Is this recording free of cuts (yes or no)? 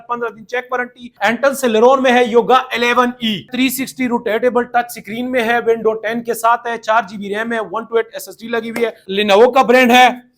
no